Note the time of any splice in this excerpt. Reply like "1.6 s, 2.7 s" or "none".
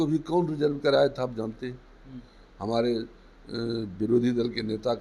none